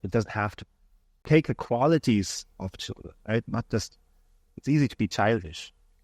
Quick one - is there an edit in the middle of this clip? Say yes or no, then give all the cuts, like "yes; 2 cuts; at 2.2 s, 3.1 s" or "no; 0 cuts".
yes; 1 cut; at 1.1 s